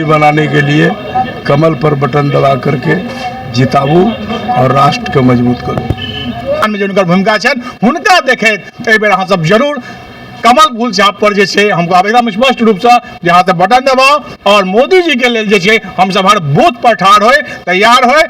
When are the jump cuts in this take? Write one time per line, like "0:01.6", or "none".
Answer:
0:06.6